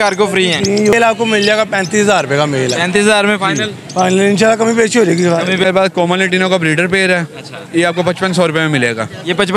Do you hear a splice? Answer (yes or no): yes